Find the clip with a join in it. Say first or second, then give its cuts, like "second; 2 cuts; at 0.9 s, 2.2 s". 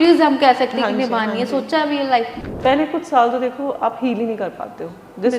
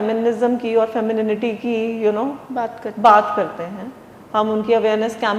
first; 1 cut; at 2.4 s